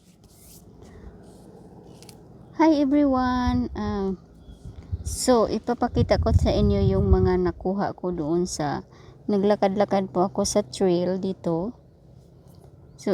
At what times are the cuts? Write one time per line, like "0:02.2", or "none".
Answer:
none